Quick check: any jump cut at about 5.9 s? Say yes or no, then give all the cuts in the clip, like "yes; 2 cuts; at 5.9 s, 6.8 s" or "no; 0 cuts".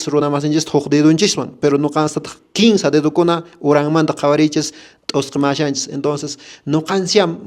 no; 0 cuts